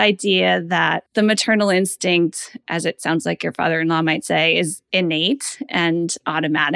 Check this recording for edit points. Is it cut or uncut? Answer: cut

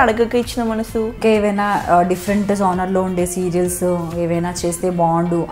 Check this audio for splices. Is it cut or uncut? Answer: cut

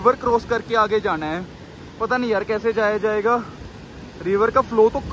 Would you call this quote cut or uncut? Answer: uncut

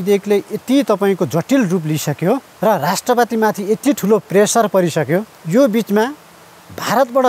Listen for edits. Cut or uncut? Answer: cut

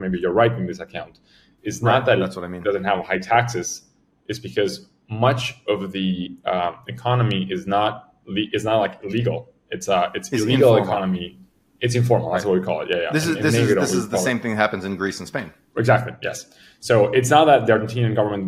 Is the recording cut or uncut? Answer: uncut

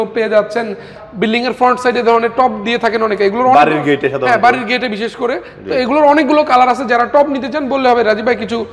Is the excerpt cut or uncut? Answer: cut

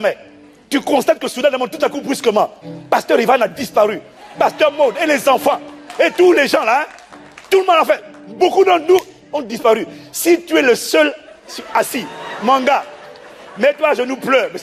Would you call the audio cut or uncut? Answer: uncut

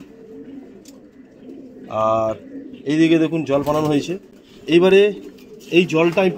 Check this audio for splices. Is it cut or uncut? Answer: uncut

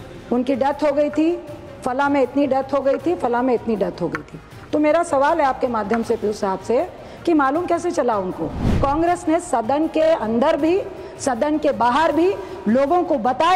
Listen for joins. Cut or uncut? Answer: cut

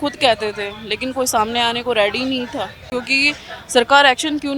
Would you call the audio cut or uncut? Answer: cut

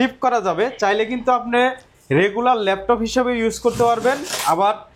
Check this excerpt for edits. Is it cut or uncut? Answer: uncut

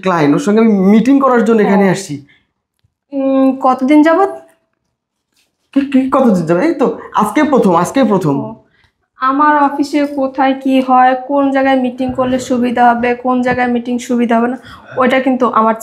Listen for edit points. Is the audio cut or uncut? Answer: uncut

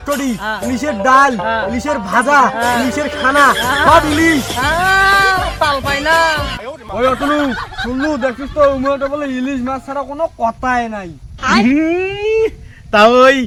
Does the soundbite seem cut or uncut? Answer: uncut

